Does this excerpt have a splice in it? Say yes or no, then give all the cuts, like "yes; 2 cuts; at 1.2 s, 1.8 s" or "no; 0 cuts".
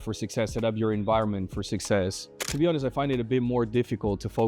yes; 1 cut; at 2.5 s